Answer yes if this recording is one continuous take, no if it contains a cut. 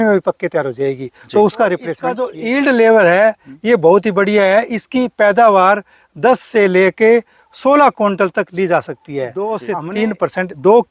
no